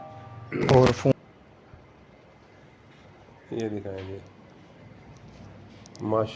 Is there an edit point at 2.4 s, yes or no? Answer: no